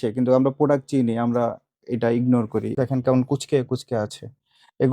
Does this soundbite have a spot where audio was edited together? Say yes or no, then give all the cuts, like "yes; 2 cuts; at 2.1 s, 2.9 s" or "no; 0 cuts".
yes; 1 cut; at 2.7 s